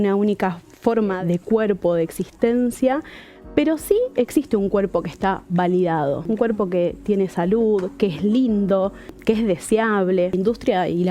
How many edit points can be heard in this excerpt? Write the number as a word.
four